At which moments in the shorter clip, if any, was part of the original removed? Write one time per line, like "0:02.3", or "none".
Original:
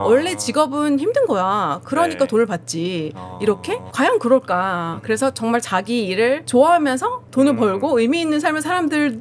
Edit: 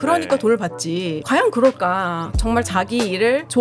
0:01.2
0:02.4